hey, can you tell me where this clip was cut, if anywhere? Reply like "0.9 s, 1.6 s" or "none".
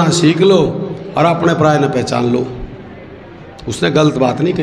none